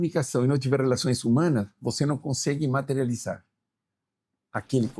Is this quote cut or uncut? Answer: uncut